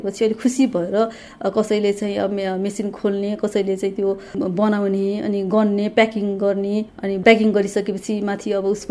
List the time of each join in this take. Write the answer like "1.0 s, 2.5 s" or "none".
none